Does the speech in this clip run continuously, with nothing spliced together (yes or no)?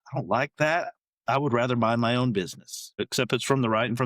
no